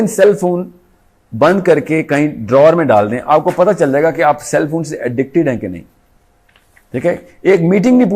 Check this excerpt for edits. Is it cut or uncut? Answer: uncut